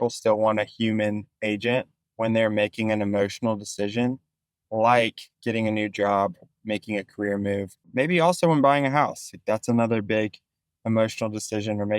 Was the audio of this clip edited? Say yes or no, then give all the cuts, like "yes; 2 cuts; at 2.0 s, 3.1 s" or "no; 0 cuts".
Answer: yes; 3 cuts; at 2.0 s, 5.3 s, 7.9 s